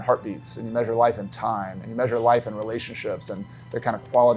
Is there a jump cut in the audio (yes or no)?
no